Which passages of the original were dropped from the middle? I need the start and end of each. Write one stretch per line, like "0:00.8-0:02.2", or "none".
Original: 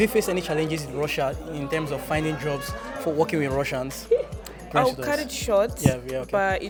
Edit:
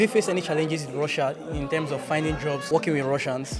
0:02.7-0:03.1